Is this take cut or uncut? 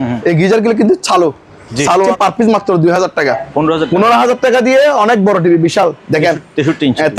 cut